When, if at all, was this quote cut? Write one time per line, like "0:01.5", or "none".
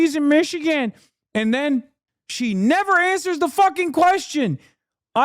none

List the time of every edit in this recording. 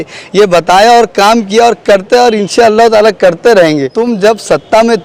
0:03.9

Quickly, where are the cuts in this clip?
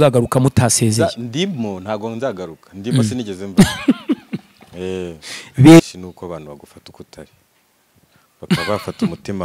0:05.8

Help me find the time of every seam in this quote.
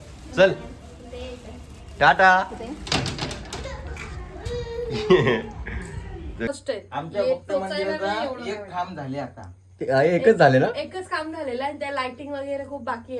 0:06.5

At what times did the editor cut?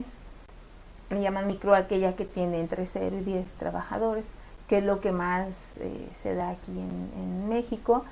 0:05.7

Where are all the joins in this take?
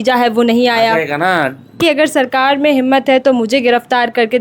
0:01.8

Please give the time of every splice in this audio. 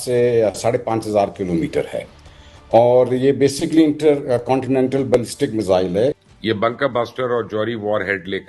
0:06.2

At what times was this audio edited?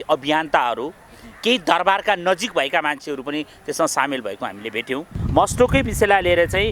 0:05.2

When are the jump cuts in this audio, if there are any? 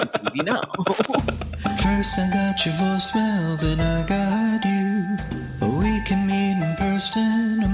0:01.4

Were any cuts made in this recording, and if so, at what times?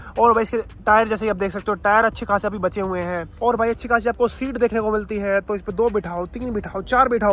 0:03.3

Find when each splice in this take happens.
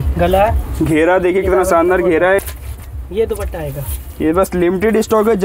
0:02.4

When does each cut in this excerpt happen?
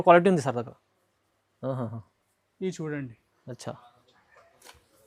none

